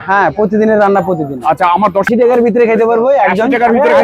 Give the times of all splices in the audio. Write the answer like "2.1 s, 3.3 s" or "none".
2.1 s